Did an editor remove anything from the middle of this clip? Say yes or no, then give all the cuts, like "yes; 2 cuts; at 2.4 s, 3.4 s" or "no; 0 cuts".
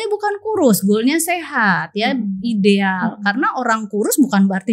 no; 0 cuts